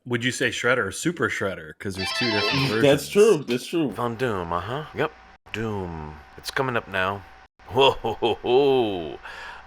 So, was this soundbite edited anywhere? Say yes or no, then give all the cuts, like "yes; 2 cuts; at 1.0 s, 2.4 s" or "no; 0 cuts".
yes; 1 cut; at 3.9 s